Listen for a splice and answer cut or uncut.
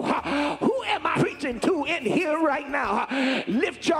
cut